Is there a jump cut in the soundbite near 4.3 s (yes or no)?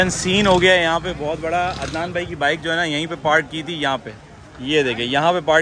no